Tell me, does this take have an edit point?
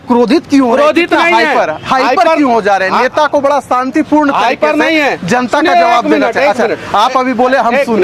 no; 0 cuts

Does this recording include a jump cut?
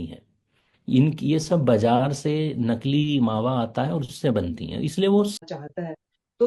yes; 1 cut; at 5.4 s

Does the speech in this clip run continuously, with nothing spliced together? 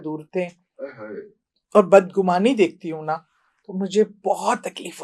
yes; 0 cuts

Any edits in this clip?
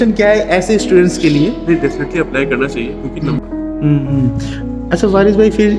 yes; 1 cut; at 3.4 s

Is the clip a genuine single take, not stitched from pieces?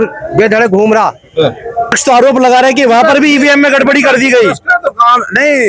no; 1 cut; at 1.9 s

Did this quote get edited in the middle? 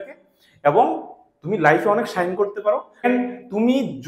yes; 1 cut; at 3.0 s

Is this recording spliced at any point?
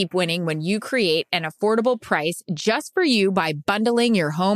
no; 0 cuts

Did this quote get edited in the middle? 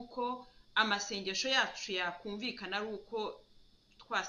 no; 0 cuts

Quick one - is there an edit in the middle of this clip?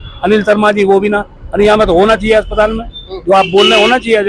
no; 0 cuts

